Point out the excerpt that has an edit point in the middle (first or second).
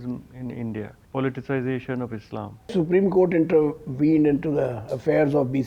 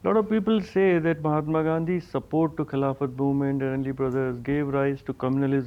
first